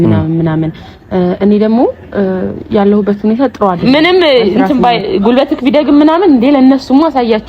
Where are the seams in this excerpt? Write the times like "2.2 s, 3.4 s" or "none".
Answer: 3.8 s